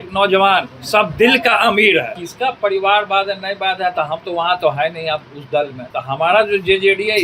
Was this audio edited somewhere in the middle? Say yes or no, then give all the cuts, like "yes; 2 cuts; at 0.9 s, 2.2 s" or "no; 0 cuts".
yes; 2 cuts; at 2.2 s, 5.8 s